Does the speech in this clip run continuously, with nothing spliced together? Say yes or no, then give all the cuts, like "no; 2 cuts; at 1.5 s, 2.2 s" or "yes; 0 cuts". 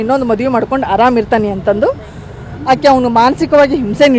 yes; 0 cuts